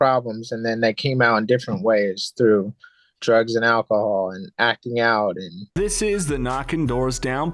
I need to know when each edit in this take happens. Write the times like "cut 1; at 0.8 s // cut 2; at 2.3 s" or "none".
cut 1; at 5.6 s